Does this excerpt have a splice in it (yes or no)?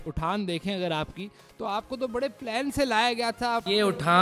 no